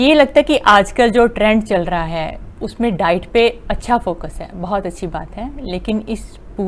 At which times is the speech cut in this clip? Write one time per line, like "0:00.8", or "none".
none